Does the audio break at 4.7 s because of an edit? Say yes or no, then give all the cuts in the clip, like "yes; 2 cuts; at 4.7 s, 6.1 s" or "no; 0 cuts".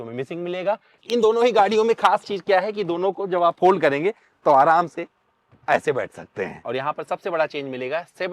no; 2 cuts; at 1.0 s, 6.6 s